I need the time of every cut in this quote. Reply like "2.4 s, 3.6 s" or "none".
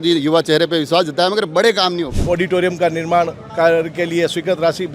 2.2 s